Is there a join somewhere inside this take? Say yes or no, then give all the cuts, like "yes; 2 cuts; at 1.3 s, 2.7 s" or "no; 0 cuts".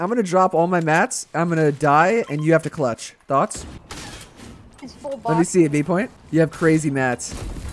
yes; 1 cut; at 3.6 s